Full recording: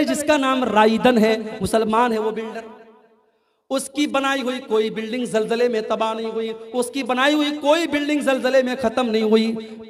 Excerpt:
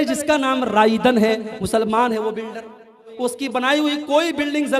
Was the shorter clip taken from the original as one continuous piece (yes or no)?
no